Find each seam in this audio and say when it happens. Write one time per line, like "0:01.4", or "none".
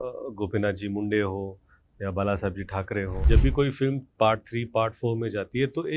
0:03.2